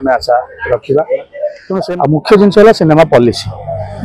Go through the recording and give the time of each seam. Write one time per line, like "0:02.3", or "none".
0:01.6